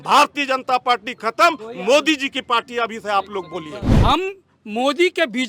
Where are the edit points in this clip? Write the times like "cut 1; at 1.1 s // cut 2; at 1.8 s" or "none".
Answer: cut 1; at 3.8 s